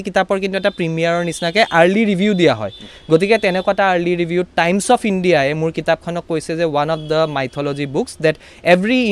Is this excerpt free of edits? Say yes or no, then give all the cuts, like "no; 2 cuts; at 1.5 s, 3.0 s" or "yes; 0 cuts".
yes; 0 cuts